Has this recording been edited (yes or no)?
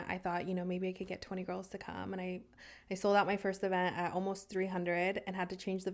no